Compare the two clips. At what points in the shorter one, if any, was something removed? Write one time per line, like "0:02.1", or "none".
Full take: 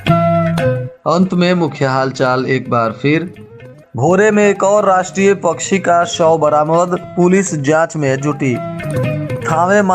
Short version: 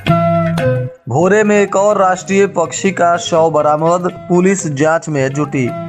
0:00.9